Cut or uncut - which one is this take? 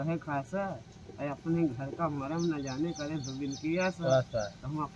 uncut